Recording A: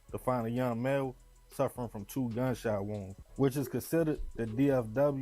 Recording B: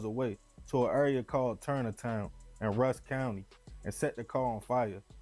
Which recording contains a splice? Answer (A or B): A